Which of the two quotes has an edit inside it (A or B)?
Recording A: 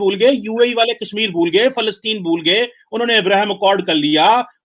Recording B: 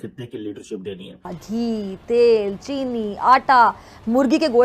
B